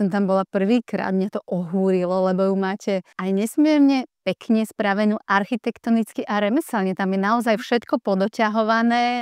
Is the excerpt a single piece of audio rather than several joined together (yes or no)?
yes